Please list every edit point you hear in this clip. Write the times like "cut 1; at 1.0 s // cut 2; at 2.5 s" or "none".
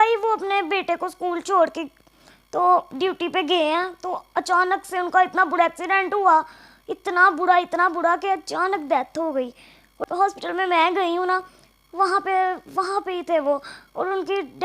none